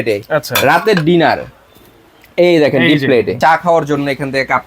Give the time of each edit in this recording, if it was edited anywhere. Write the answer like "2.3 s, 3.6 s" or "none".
3.3 s